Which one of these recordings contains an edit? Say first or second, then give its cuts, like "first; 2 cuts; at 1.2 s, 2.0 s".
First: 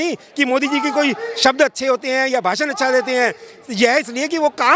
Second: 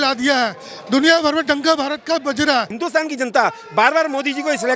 second; 1 cut; at 2.8 s